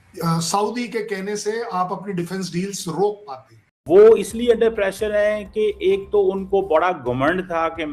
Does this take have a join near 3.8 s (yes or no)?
yes